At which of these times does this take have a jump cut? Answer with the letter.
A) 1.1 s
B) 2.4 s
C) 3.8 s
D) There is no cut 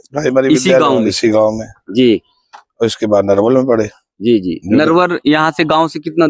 D